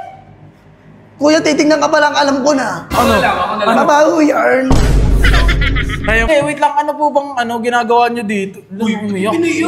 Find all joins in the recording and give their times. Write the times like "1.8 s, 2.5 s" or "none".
6.3 s